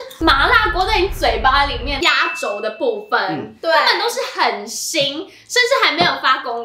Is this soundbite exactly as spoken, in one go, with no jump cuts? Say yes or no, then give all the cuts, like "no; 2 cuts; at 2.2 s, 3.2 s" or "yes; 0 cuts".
no; 1 cut; at 2.0 s